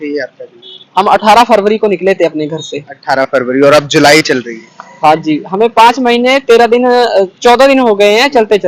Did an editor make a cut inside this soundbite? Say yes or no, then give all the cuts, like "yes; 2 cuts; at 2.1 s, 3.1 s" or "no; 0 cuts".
no; 0 cuts